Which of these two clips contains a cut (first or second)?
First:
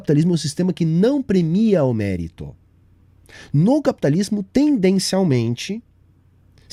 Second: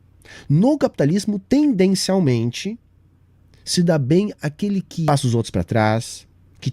second